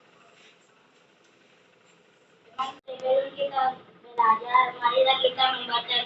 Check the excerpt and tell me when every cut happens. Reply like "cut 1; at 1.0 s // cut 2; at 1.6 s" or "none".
none